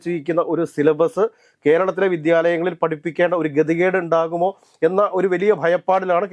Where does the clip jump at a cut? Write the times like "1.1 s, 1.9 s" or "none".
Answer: none